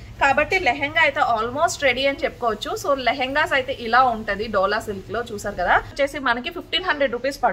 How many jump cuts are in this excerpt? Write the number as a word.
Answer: one